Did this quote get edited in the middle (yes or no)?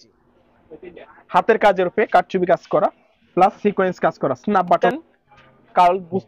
yes